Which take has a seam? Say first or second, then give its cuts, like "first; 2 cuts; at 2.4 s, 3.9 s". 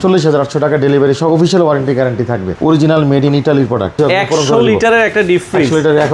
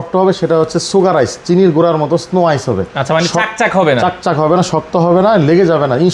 first; 2 cuts; at 2.5 s, 4.0 s